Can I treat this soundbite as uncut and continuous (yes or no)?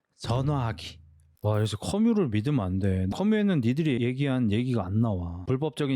no